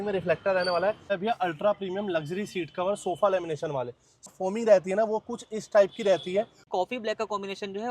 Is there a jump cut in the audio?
yes; 3 cuts; at 1.1 s, 4.3 s, 6.6 s

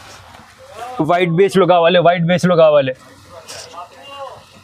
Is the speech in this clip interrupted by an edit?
no; 0 cuts

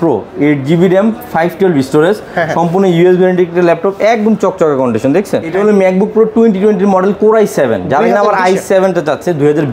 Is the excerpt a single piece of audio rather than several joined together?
no; 1 cut; at 5.5 s

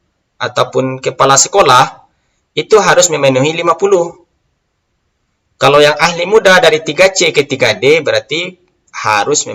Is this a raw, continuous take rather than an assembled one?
yes; 0 cuts

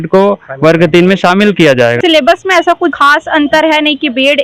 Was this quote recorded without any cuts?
no; 2 cuts; at 2.0 s, 3.0 s

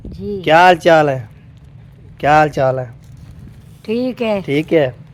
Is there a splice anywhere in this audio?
no; 0 cuts

